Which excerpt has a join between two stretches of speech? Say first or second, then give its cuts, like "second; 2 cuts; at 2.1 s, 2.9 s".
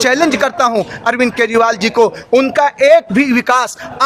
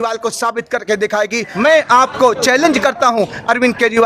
second; 1 cut; at 1.5 s